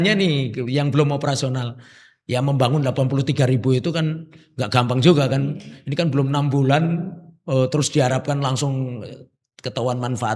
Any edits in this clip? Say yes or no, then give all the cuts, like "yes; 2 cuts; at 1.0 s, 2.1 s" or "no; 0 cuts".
no; 0 cuts